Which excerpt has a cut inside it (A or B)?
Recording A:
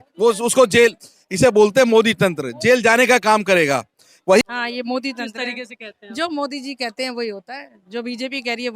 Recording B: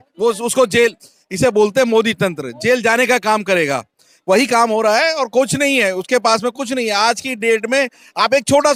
A